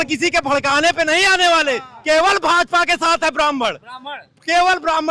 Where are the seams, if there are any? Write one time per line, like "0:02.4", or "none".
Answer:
none